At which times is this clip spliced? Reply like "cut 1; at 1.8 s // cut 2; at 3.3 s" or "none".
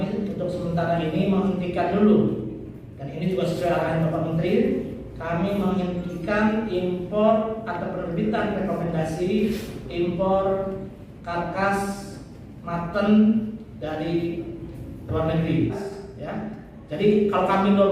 cut 1; at 15.8 s